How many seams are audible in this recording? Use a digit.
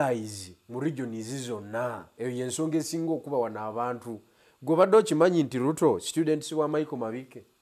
1